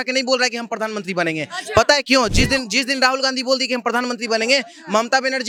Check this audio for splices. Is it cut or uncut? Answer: uncut